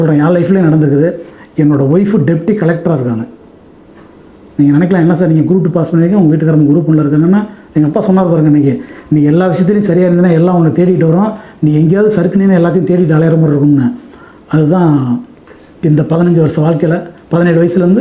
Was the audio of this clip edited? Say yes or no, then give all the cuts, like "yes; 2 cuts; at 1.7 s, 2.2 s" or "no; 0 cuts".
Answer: no; 0 cuts